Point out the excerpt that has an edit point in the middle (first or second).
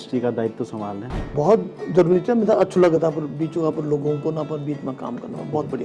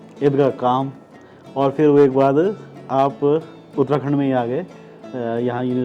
first